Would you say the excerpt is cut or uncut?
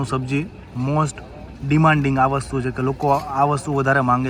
uncut